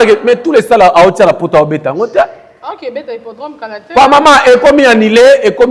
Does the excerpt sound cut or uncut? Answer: uncut